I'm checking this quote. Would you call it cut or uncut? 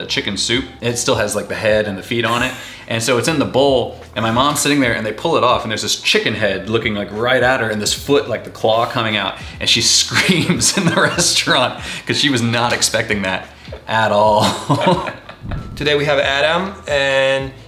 uncut